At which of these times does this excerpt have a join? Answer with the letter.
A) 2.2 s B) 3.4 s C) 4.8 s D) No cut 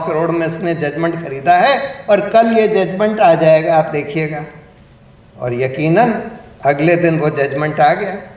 D